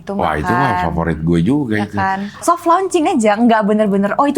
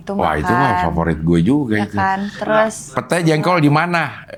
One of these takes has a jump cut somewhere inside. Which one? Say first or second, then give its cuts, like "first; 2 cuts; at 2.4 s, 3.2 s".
first; 1 cut; at 2.3 s